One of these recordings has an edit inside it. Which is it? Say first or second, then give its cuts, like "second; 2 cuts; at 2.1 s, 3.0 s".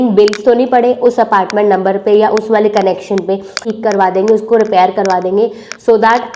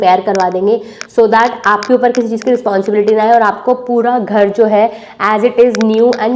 first; 1 cut; at 3.6 s